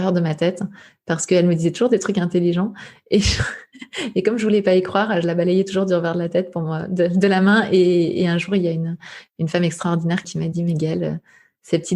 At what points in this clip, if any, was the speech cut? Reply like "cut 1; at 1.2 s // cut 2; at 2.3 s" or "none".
cut 1; at 10.3 s